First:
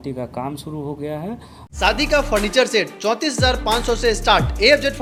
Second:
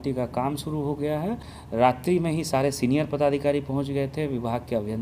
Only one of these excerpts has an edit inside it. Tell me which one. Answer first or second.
second